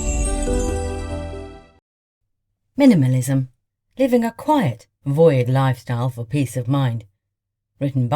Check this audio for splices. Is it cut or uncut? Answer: cut